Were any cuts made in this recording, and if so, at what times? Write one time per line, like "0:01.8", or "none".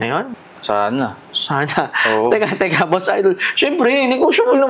none

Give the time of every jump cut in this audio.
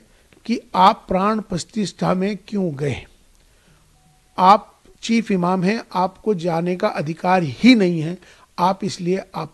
none

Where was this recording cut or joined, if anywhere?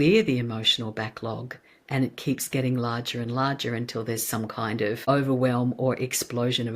0:05.0

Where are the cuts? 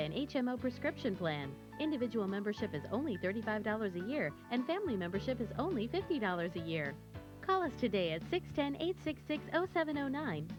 none

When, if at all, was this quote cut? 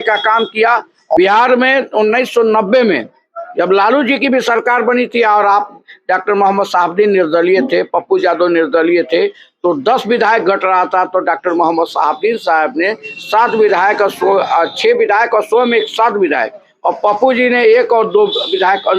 0:01.2

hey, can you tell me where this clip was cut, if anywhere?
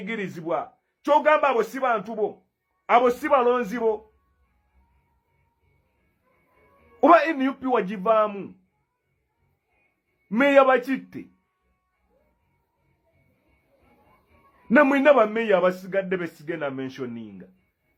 none

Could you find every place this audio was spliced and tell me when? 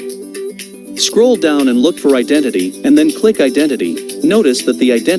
0:01.1
0:04.0

